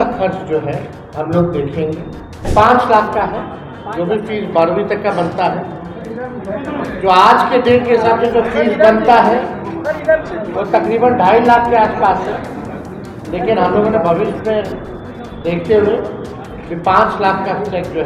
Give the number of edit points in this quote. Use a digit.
2